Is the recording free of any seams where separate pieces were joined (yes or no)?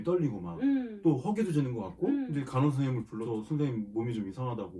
no